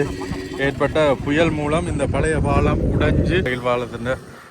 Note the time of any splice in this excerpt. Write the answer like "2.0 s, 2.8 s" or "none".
3.5 s